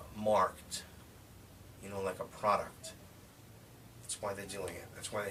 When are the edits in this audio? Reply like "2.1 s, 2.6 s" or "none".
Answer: none